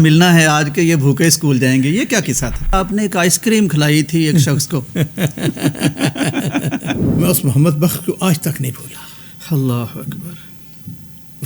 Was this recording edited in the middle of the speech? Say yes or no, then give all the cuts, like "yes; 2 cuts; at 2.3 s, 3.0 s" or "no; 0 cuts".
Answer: yes; 2 cuts; at 2.7 s, 7.1 s